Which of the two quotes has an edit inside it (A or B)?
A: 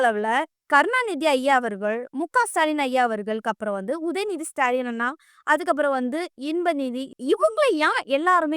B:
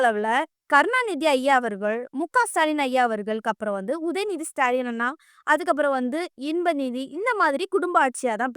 A